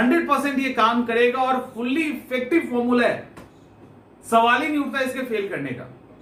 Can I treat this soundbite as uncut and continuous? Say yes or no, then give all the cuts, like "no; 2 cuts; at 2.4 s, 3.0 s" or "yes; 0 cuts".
yes; 0 cuts